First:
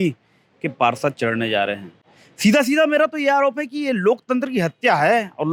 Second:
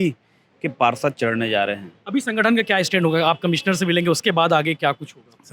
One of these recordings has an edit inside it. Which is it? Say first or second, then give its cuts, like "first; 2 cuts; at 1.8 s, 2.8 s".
second; 1 cut; at 2.3 s